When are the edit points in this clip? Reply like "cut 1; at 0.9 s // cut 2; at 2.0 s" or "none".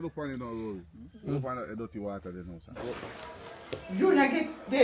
cut 1; at 3.0 s